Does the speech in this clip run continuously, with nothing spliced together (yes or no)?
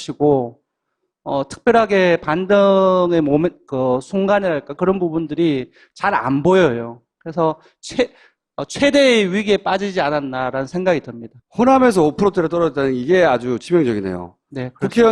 yes